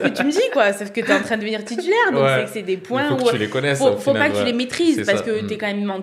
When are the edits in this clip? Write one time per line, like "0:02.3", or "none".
none